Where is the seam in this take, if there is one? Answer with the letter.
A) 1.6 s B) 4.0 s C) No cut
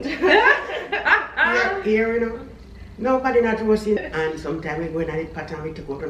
B